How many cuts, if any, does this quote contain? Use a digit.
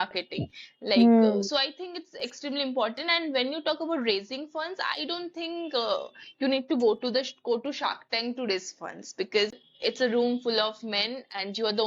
1